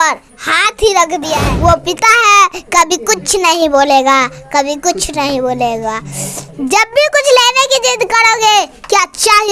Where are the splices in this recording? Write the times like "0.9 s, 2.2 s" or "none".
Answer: 1.4 s